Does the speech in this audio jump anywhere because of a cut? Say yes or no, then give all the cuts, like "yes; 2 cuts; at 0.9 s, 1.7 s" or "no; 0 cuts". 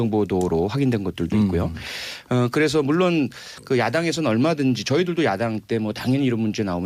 yes; 1 cut; at 5.2 s